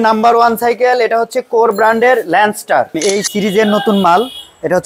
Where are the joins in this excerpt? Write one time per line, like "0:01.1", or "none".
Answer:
0:02.9